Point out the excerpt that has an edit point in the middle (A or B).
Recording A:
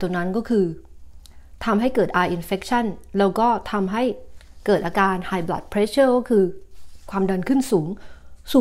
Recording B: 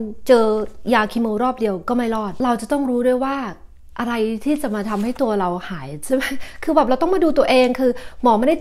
B